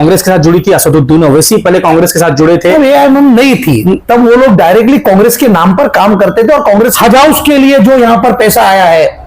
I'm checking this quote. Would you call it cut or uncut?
cut